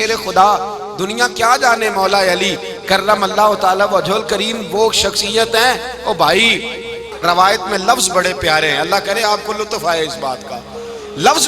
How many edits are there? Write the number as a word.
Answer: one